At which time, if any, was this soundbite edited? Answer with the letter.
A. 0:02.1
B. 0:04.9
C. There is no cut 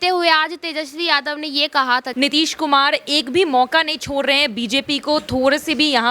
A